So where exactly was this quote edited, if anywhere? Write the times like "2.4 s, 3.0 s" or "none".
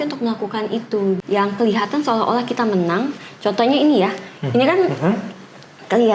1.2 s